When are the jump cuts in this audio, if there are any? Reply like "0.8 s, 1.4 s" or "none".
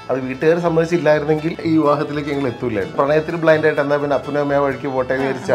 1.5 s, 2.9 s